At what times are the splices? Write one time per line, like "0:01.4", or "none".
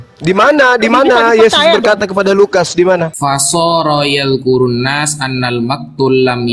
0:03.1